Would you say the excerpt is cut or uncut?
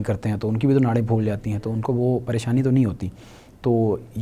uncut